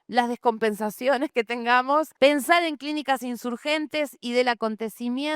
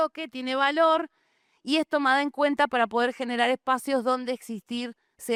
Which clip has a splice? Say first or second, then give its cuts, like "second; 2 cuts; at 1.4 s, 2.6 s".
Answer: first; 1 cut; at 2.1 s